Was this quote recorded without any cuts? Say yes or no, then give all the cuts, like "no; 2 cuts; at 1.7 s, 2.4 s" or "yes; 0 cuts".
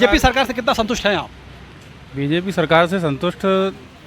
yes; 0 cuts